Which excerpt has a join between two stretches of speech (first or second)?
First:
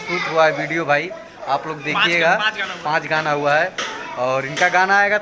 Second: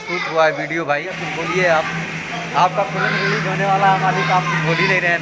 second